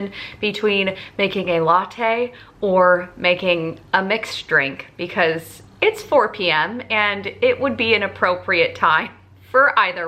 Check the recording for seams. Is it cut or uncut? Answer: uncut